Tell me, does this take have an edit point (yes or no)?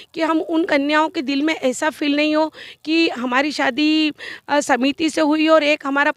no